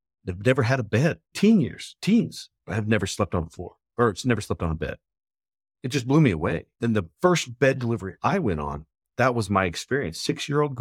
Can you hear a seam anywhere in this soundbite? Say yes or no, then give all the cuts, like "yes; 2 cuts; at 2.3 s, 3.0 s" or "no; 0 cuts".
no; 0 cuts